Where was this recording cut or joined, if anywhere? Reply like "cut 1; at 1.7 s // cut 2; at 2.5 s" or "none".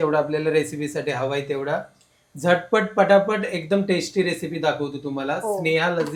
none